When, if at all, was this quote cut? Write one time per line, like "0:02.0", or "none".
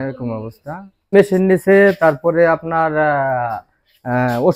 0:01.1